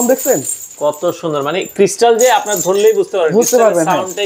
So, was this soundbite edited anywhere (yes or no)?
no